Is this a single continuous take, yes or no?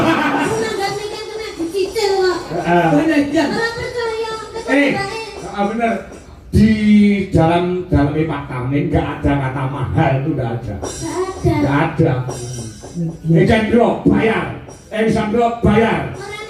yes